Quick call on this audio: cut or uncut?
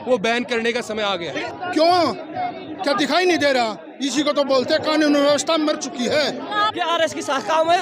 cut